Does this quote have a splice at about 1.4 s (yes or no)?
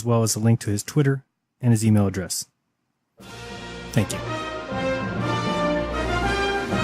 no